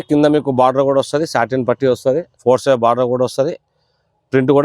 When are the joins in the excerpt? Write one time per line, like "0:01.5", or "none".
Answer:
0:02.3